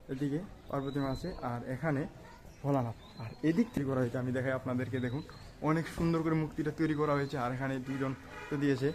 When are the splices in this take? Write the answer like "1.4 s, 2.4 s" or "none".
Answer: 3.7 s